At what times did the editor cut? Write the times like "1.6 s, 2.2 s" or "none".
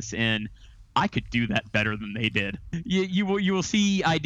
2.6 s